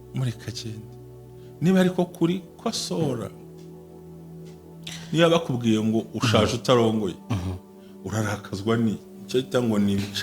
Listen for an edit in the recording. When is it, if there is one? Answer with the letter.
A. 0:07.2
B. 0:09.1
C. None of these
B